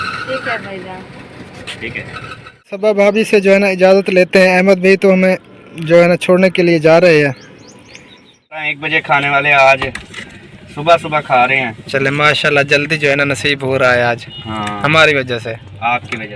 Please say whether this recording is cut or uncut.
cut